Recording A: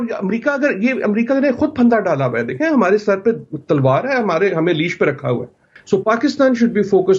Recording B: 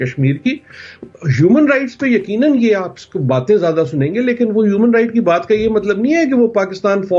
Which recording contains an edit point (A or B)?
A